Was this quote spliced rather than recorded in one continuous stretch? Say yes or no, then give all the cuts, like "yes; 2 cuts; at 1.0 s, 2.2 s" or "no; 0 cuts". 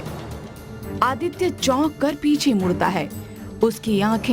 no; 0 cuts